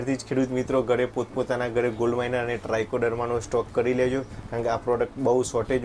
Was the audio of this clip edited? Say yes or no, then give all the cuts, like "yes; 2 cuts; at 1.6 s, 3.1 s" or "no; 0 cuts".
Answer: no; 0 cuts